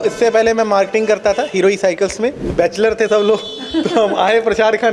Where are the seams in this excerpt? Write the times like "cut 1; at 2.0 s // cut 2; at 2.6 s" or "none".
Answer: cut 1; at 2.4 s